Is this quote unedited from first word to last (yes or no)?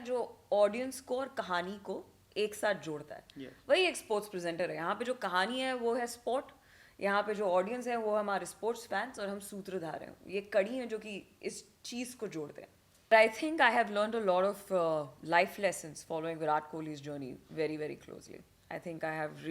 no